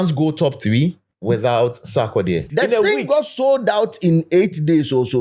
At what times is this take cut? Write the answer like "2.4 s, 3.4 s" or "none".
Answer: 1.1 s, 2.5 s